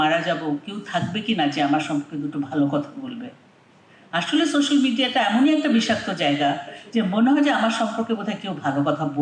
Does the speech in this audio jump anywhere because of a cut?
no; 0 cuts

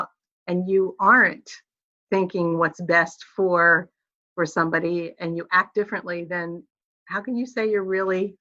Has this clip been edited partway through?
no; 0 cuts

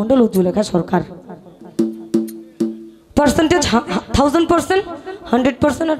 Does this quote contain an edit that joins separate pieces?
no; 0 cuts

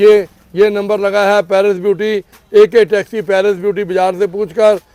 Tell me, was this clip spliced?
no; 0 cuts

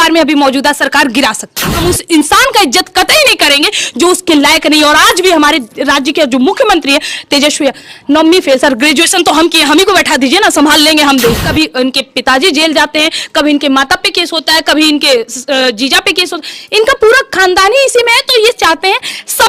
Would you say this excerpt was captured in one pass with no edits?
no; 2 cuts; at 1.8 s, 11.4 s

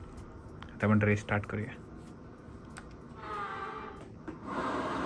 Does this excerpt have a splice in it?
no; 0 cuts

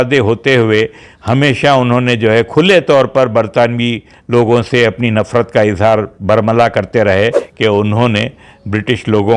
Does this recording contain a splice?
yes; 1 cut; at 7.5 s

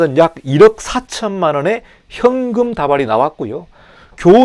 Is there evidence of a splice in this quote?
no; 0 cuts

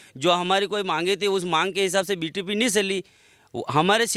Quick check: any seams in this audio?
no; 0 cuts

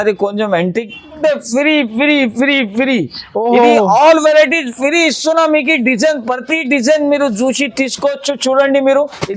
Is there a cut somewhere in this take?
yes; 1 cut; at 1.1 s

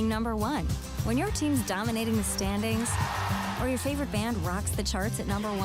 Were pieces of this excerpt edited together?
no; 0 cuts

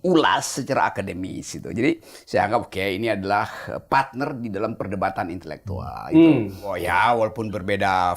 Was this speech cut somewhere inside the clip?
yes; 1 cut; at 6.8 s

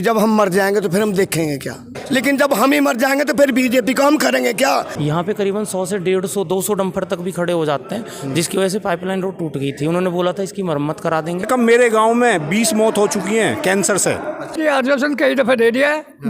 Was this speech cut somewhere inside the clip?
yes; 4 cuts; at 1.9 s, 4.9 s, 11.5 s, 14.6 s

